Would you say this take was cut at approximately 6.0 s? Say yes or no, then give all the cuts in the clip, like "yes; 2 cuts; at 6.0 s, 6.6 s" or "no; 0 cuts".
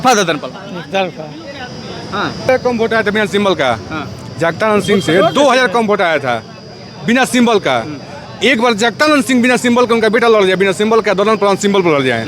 no; 1 cut; at 2.5 s